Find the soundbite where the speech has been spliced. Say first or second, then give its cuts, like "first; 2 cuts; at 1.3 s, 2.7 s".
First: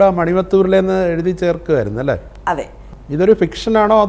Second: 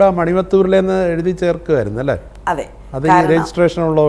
first; 1 cut; at 2.8 s